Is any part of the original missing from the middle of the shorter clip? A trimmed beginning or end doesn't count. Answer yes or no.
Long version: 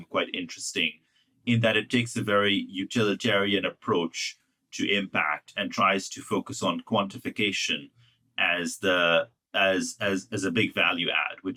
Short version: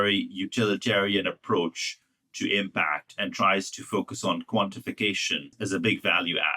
yes